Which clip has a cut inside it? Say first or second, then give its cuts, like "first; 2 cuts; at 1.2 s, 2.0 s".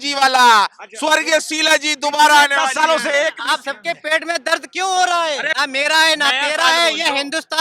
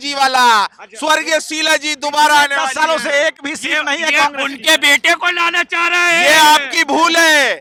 first; 2 cuts; at 3.4 s, 5.5 s